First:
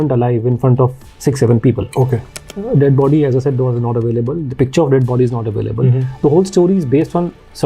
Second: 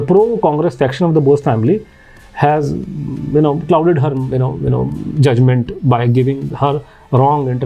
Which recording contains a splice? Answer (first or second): first